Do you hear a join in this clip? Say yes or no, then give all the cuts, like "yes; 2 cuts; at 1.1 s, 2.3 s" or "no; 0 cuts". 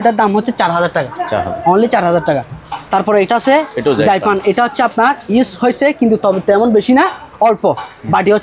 no; 0 cuts